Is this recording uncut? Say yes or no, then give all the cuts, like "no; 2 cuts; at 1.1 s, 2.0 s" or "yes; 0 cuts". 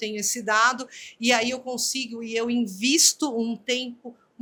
yes; 0 cuts